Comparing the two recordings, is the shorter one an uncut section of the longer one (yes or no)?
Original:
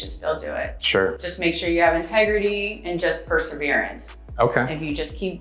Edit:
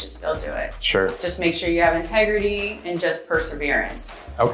yes